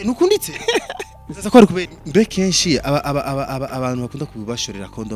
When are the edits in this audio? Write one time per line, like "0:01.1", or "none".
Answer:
0:01.9